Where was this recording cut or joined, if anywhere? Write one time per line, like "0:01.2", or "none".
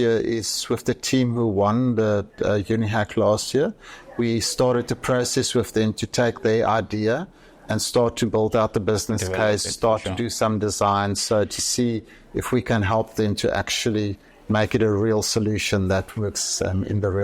none

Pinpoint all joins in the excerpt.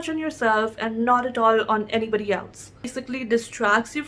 0:02.8

